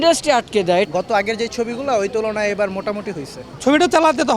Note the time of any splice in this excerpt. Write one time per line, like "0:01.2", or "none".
0:00.9
0:03.5